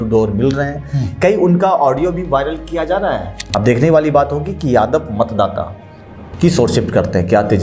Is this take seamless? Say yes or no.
no